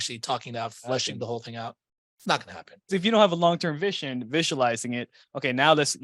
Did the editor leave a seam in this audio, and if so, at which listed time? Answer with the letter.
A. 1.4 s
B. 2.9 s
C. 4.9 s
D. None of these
B